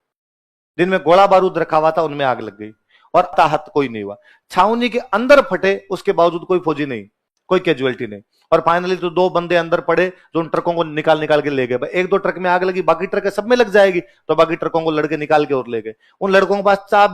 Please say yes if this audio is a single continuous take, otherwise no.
no